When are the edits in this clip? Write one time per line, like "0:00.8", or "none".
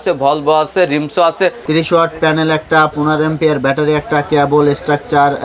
0:01.6